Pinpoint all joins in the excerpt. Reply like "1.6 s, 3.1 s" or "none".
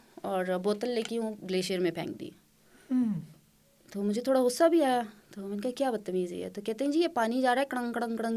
none